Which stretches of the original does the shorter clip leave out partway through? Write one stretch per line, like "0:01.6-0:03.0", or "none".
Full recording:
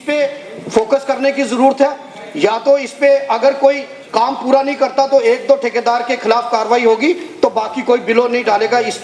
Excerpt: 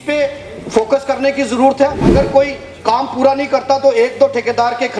0:02.0-0:03.3